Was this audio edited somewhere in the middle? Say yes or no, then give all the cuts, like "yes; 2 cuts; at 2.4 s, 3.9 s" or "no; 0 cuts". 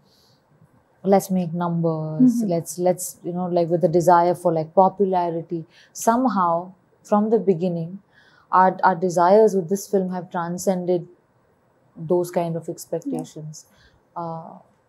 no; 0 cuts